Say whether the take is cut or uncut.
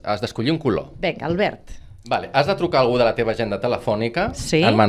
cut